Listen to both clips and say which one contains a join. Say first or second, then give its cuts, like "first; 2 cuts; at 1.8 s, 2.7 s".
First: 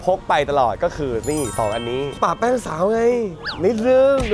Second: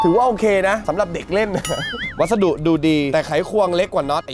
second; 2 cuts; at 1.9 s, 3.1 s